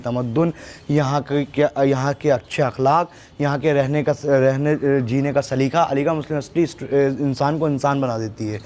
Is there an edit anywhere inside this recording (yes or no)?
no